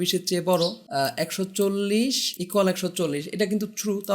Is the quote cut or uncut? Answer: cut